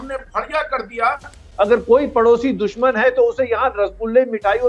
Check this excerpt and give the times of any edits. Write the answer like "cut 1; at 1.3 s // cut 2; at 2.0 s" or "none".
cut 1; at 1.4 s